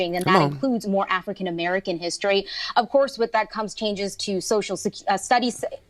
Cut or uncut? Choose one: uncut